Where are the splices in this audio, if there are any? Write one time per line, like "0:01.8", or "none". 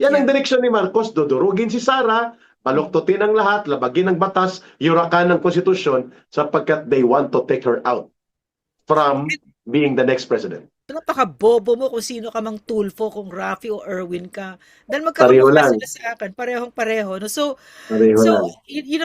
0:10.9

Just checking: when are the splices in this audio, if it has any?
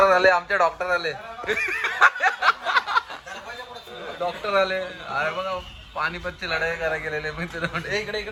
none

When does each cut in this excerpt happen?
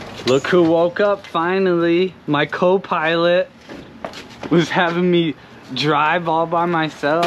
none

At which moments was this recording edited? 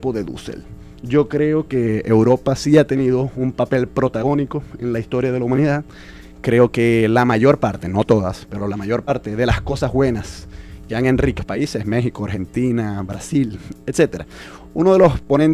none

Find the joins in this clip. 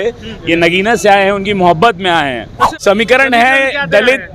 0:02.6

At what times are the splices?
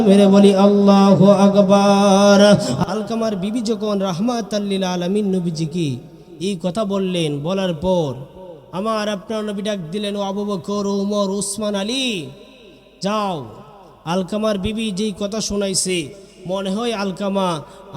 0:02.8

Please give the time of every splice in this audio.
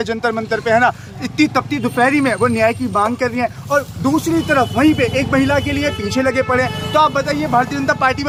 none

